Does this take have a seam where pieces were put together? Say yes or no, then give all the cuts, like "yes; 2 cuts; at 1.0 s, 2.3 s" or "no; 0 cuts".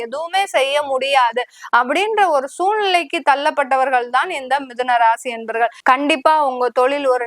yes; 1 cut; at 5.8 s